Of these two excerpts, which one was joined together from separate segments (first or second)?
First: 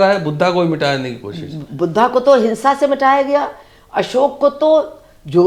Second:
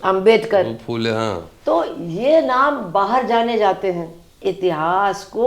second